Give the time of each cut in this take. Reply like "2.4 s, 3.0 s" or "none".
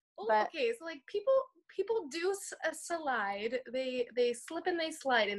none